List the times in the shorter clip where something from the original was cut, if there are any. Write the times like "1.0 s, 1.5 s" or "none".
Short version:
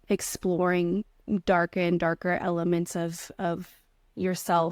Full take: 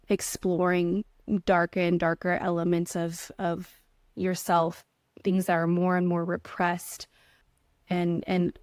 none